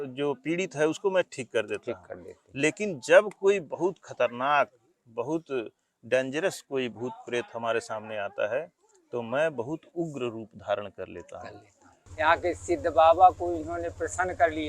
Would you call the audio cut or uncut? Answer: cut